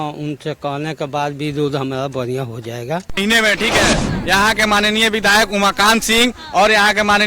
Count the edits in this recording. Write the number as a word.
one